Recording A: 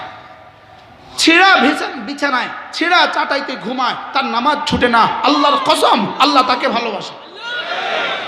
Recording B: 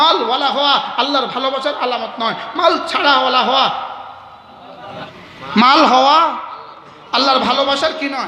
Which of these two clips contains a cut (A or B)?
B